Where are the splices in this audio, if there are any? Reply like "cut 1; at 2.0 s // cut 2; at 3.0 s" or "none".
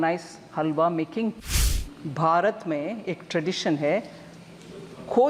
cut 1; at 1.5 s